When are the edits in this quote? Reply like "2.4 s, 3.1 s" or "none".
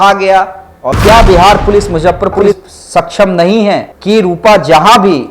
1.0 s